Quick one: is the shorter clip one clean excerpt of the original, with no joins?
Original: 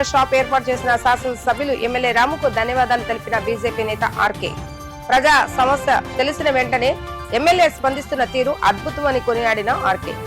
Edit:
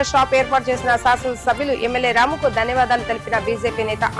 yes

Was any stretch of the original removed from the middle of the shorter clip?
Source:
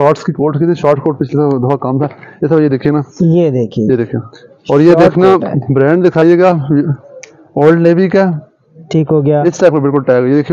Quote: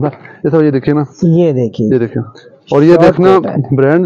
no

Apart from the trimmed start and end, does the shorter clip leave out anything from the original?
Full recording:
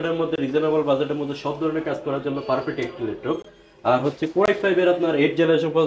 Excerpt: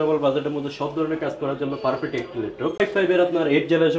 yes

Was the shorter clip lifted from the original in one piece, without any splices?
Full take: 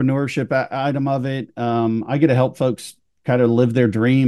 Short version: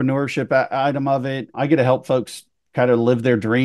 no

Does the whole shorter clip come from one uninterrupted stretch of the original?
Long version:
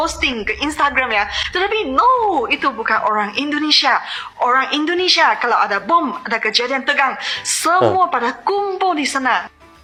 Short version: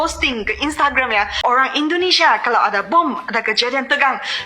no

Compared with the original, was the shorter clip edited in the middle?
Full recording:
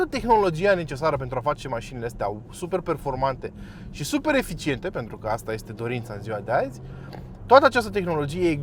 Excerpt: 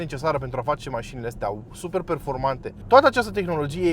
yes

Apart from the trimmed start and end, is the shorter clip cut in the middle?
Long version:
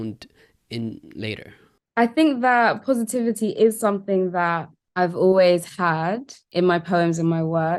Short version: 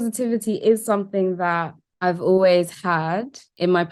no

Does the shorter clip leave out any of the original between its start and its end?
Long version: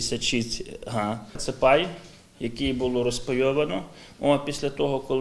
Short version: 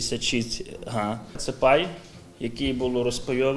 no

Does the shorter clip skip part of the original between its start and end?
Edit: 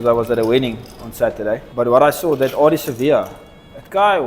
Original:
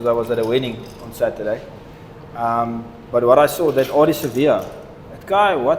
yes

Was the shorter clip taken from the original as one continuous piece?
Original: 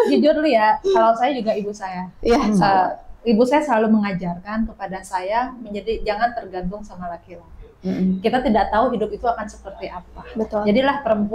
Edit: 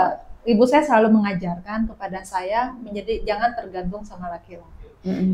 yes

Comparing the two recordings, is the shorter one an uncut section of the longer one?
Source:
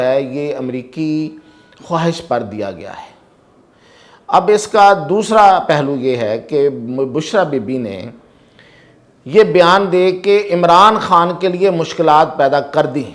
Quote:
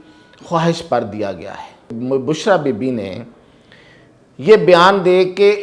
no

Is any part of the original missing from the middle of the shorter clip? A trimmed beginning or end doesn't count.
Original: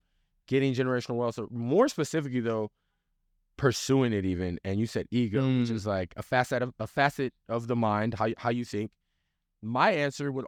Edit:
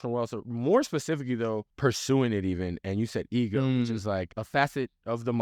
yes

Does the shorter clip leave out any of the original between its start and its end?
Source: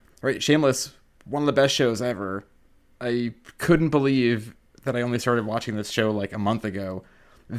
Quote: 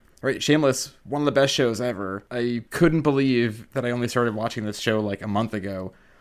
yes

